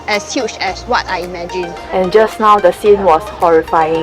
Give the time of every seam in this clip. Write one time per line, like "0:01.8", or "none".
0:01.8